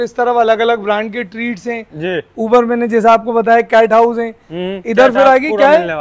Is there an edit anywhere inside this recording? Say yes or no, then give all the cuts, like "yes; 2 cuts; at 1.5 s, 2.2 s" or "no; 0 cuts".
no; 0 cuts